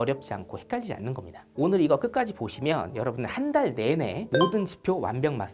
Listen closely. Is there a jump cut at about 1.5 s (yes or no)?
yes